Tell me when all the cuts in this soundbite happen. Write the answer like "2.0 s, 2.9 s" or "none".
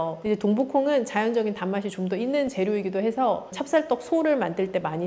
3.5 s